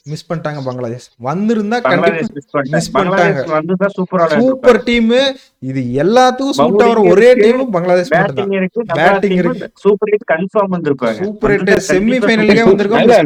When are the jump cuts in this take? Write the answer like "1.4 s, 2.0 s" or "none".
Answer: none